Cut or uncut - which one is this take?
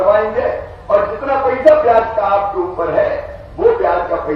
uncut